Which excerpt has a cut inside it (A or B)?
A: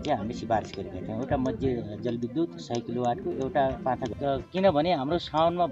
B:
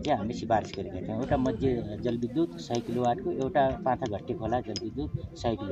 A